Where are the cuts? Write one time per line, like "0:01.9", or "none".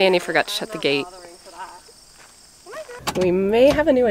0:02.9